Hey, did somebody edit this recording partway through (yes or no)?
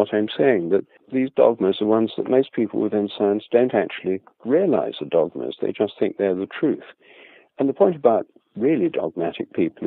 yes